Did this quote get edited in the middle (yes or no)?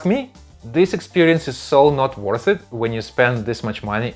no